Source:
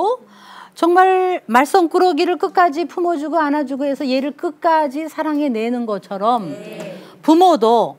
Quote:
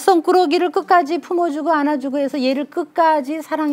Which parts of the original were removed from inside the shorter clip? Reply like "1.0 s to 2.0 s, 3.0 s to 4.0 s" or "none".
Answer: none